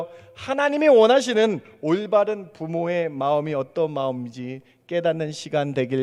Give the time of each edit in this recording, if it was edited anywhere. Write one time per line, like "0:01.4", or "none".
none